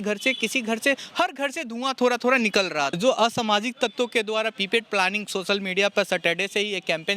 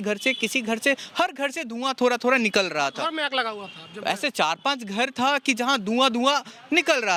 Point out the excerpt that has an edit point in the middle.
first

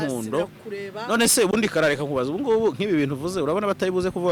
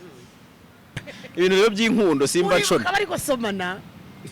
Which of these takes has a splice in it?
second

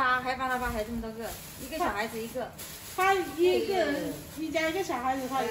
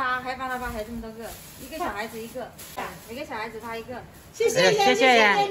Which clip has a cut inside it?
second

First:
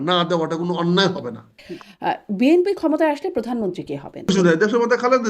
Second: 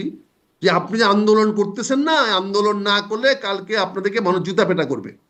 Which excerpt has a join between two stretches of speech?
first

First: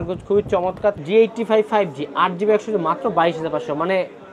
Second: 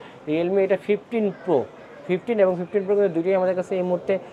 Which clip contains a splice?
first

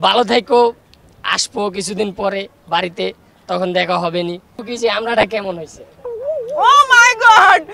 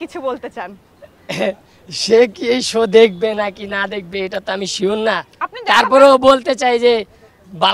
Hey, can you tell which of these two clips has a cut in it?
first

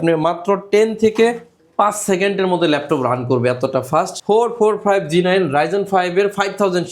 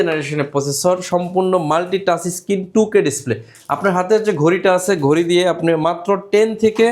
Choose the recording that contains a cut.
first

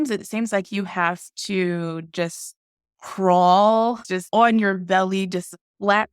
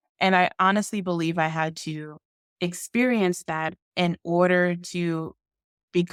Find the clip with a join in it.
first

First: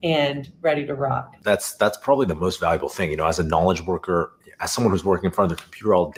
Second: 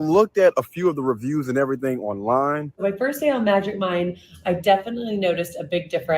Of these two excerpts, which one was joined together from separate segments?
second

